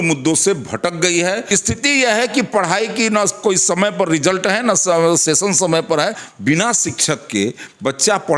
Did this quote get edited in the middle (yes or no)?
yes